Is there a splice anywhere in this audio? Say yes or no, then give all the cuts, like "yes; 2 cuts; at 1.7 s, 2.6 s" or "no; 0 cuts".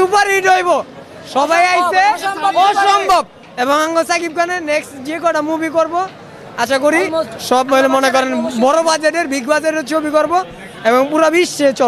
no; 0 cuts